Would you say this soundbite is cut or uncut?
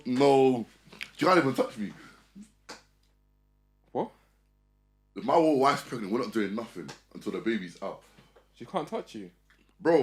uncut